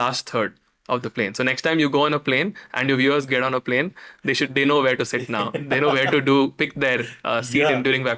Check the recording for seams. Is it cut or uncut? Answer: uncut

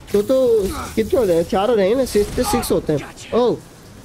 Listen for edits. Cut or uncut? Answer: uncut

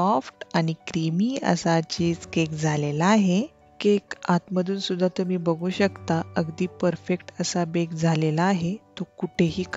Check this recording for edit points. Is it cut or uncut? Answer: uncut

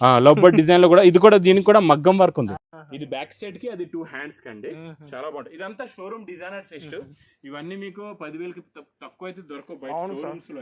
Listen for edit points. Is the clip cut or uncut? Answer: uncut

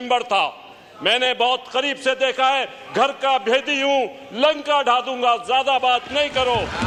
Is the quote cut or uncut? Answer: uncut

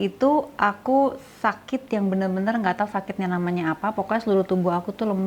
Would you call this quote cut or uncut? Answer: uncut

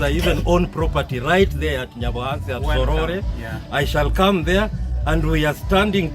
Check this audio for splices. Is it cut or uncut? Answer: uncut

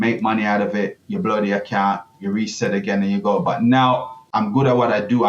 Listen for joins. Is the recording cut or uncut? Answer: cut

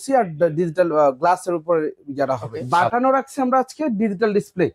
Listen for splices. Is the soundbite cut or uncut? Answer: cut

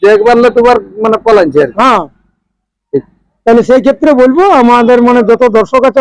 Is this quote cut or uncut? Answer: uncut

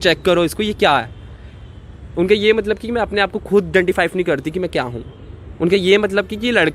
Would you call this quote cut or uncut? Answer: uncut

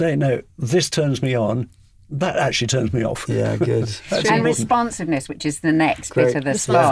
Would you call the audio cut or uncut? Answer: uncut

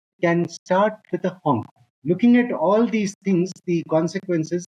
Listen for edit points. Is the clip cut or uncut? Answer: uncut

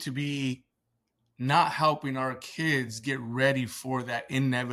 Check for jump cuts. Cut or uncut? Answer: uncut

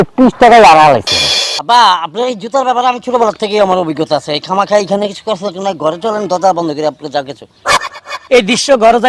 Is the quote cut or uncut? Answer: cut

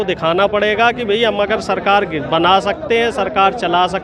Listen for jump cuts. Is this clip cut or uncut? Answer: uncut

